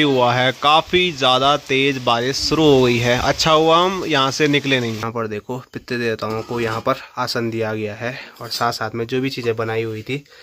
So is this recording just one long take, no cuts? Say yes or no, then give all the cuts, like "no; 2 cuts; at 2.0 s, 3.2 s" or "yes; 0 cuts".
no; 1 cut; at 5.0 s